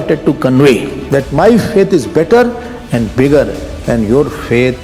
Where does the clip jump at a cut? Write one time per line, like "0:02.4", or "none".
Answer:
0:00.9